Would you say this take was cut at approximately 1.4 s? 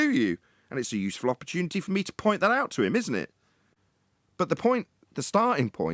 no; 1 cut; at 3.4 s

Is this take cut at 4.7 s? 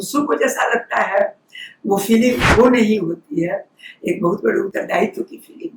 yes; 1 cut; at 4.7 s

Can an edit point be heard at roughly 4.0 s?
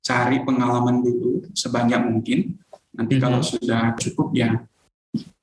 yes; 1 cut; at 4.0 s

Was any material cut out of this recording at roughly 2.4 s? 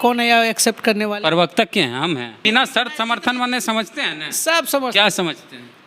yes; 1 cut; at 2.4 s

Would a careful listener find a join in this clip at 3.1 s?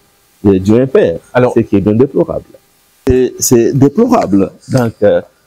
yes; 1 cut; at 3.1 s

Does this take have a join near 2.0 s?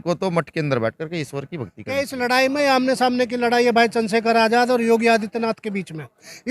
yes; 1 cut; at 2.0 s

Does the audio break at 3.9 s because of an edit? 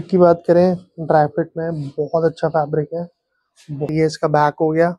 yes; 1 cut; at 3.9 s

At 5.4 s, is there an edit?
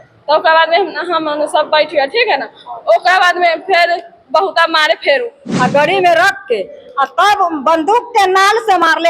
yes; 1 cut; at 5.4 s

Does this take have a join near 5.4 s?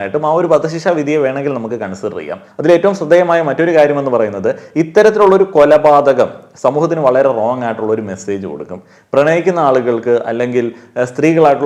no; 1 cut; at 2.4 s

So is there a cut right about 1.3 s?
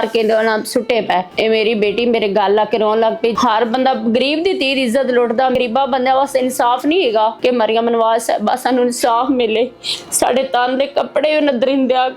no; 3 cuts; at 3.3 s, 5.5 s, 7.4 s

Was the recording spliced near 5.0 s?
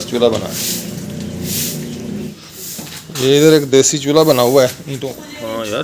yes; 2 cuts; at 2.4 s, 5.0 s

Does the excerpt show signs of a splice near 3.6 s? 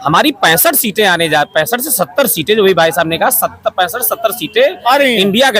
no; 0 cuts

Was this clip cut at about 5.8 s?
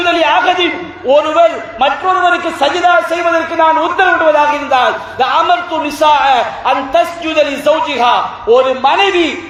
no; 0 cuts

